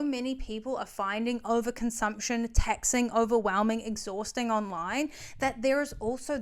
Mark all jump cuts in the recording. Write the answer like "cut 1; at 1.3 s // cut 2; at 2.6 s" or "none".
none